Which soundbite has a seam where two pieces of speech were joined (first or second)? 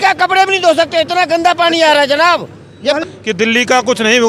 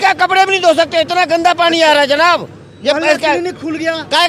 first